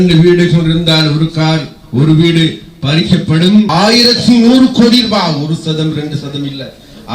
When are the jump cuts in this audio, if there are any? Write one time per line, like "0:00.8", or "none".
0:03.7